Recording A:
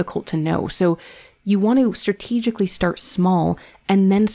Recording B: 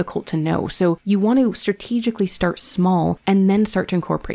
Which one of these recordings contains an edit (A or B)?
B